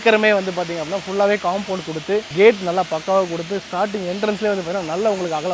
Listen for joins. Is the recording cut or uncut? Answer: uncut